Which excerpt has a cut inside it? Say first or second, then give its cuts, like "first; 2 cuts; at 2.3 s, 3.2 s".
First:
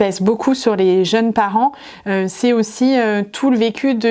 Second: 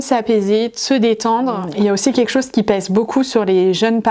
second; 1 cut; at 1.6 s